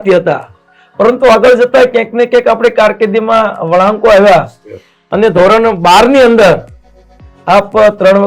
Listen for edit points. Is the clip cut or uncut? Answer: uncut